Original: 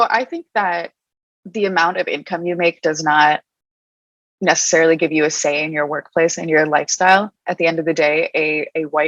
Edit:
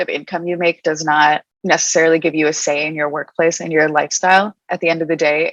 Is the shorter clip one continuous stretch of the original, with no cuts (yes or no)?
no